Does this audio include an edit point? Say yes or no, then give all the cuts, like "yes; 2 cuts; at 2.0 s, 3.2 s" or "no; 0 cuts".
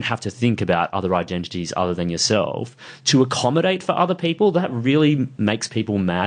yes; 1 cut; at 4.7 s